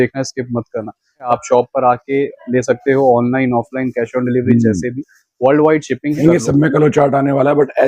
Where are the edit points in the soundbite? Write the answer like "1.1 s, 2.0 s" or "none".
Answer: 1.3 s, 6.2 s